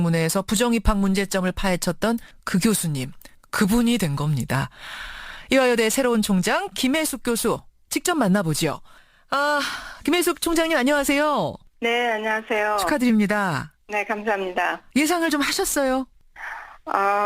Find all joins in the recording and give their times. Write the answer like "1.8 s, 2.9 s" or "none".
13.7 s